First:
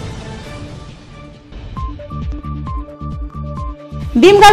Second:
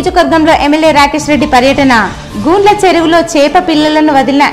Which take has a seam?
first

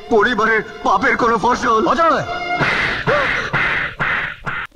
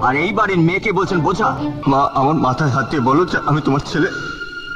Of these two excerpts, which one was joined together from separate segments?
second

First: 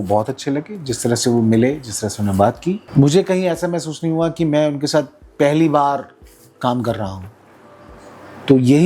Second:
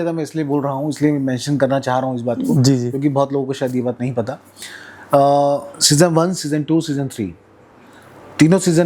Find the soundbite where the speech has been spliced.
first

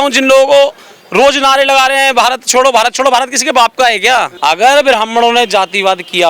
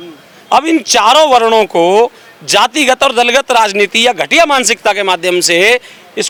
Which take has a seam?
first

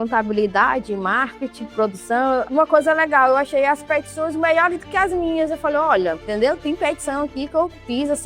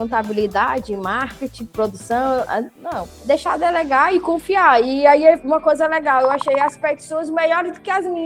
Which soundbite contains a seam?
first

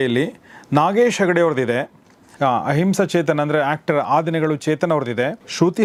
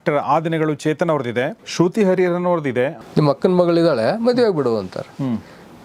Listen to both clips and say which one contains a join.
second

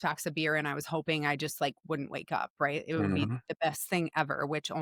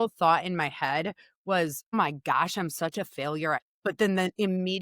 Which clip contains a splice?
second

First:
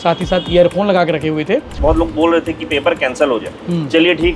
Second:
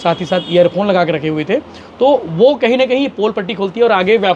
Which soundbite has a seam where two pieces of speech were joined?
first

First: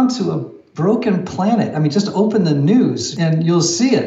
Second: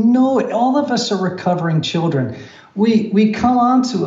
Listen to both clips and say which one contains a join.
first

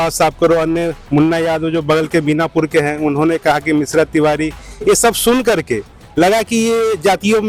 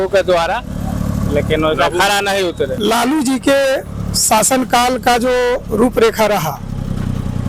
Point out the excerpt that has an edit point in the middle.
second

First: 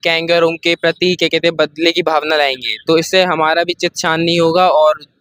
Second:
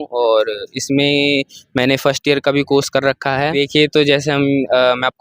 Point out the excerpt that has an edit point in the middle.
second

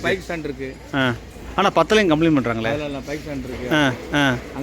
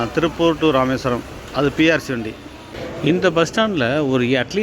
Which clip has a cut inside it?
second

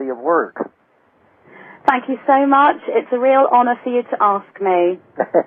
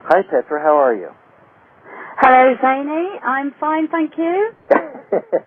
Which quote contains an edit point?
second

